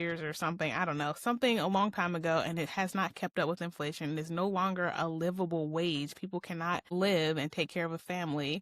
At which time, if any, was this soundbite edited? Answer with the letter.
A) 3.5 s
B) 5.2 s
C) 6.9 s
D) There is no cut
C